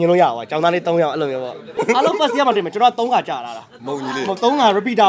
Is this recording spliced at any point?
yes; 1 cut; at 1.7 s

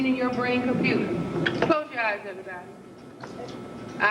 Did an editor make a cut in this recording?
no; 0 cuts

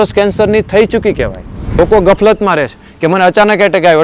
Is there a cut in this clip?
yes; 1 cut; at 1.8 s

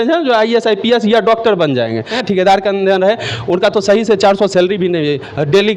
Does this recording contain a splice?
yes; 1 cut; at 2.1 s

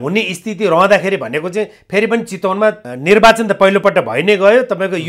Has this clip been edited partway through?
yes; 1 cut; at 2.9 s

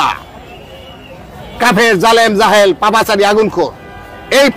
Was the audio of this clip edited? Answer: no; 0 cuts

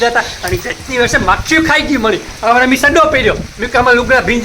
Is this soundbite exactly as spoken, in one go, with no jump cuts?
yes; 0 cuts

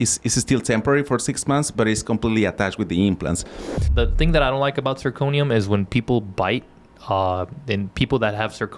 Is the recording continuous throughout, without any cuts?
no; 1 cut; at 3.8 s

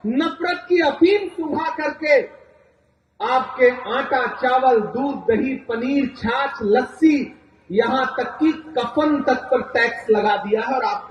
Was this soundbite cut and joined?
no; 0 cuts

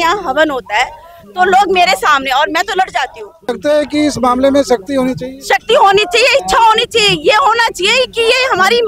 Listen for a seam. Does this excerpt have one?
yes; 1 cut; at 3.5 s

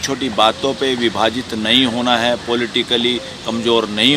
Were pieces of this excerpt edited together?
no; 0 cuts

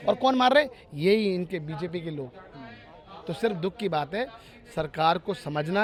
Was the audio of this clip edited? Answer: no; 0 cuts

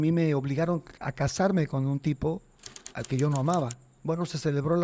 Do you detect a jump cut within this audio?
yes; 1 cut; at 3.9 s

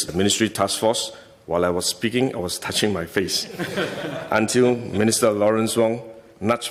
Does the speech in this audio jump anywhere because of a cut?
no; 0 cuts

